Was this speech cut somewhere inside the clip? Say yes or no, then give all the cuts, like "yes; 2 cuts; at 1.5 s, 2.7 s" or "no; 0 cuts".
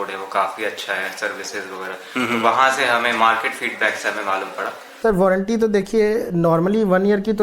yes; 1 cut; at 4.9 s